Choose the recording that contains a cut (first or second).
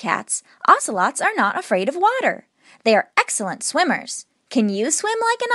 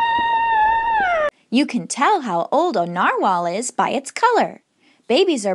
second